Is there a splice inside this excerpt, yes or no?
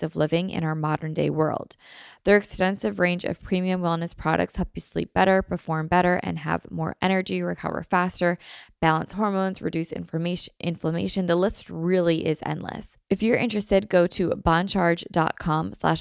yes